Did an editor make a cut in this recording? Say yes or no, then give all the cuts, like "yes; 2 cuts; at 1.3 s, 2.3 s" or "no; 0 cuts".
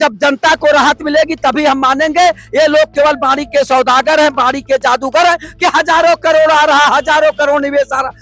no; 0 cuts